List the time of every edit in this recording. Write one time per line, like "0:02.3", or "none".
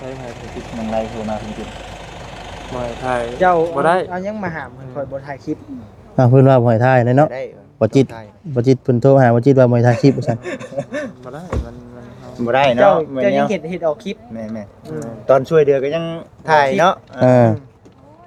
none